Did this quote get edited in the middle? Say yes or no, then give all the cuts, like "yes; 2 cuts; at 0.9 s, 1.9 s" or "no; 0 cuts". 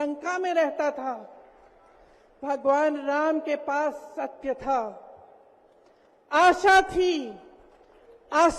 no; 0 cuts